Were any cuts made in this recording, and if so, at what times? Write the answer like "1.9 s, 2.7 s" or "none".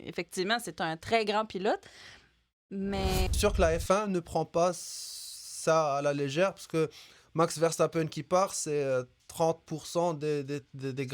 3.3 s